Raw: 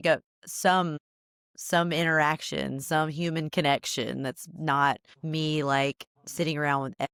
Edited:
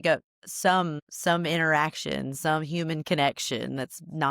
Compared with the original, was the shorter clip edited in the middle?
yes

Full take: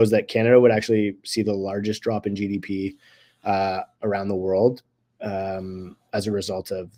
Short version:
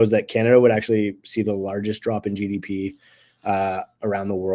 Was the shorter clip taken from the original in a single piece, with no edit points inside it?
yes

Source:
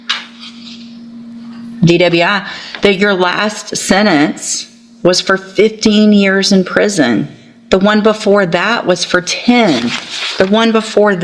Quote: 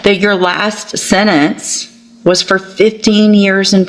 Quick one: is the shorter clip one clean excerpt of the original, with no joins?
yes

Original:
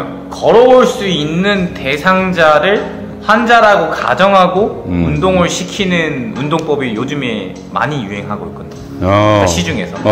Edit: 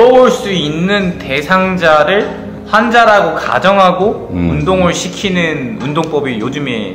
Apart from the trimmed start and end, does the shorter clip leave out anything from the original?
no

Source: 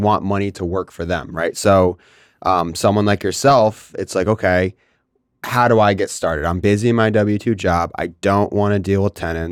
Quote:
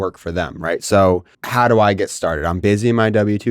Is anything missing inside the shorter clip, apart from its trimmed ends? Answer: yes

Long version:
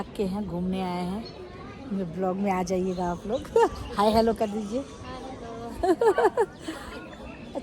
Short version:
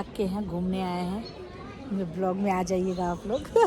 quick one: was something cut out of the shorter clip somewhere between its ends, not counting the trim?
no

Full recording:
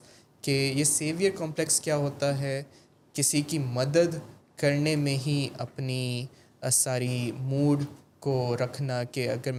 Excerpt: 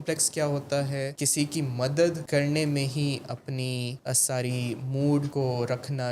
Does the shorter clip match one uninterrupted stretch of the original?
no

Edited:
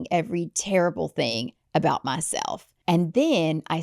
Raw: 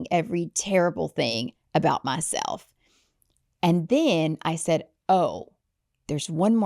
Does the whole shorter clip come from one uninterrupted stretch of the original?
no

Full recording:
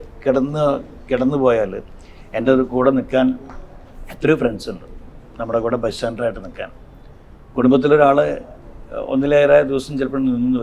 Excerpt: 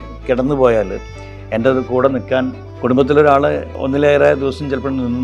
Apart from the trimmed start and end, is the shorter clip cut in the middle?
yes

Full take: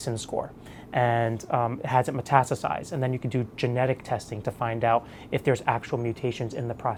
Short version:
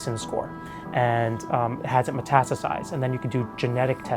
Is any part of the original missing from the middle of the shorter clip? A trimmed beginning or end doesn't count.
no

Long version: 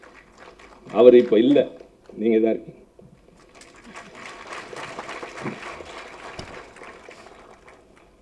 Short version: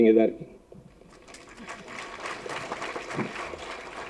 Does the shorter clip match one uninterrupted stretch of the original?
yes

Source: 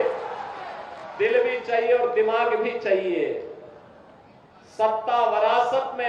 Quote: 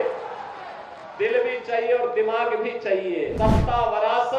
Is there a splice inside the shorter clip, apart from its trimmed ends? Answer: yes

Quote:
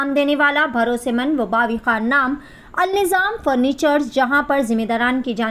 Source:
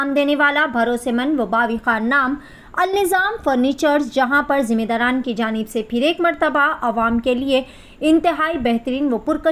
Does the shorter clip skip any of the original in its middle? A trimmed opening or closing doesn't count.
no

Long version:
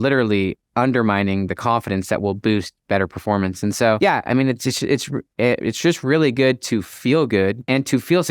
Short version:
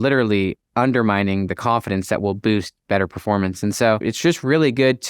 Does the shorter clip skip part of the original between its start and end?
yes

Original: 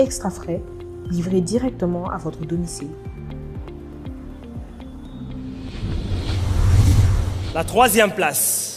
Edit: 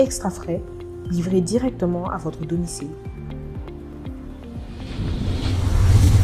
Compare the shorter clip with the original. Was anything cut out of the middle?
yes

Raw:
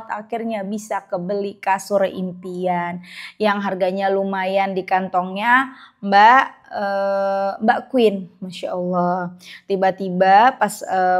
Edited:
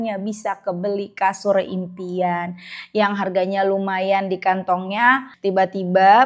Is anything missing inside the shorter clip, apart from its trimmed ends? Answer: yes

